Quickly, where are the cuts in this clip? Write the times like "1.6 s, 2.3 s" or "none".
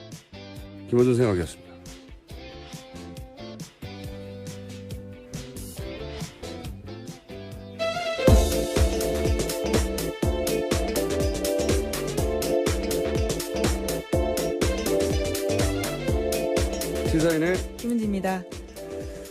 1.2 s